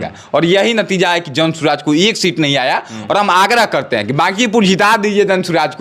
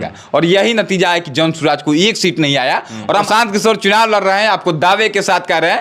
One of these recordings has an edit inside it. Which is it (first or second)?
second